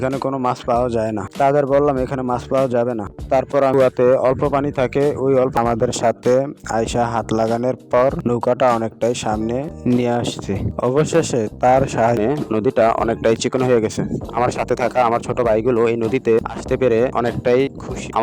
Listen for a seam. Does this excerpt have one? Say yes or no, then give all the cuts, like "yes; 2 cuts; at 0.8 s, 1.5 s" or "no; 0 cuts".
yes; 3 cuts; at 3.7 s, 5.6 s, 12.2 s